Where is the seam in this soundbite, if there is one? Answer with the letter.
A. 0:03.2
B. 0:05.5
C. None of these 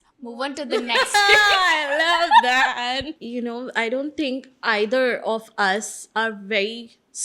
A